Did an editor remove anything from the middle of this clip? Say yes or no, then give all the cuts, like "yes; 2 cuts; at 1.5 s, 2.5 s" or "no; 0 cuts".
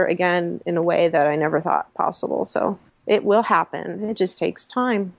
yes; 1 cut; at 2.9 s